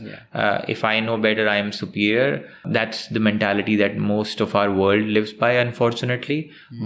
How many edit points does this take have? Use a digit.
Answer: 1